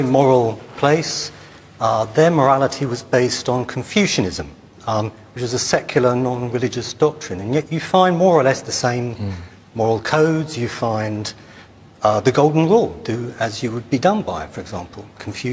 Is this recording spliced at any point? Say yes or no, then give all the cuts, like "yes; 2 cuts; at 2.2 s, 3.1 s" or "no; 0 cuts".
yes; 1 cut; at 8.6 s